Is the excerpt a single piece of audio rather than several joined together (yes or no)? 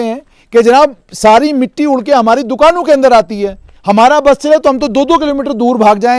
yes